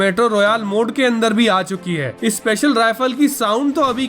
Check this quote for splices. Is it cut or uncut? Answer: uncut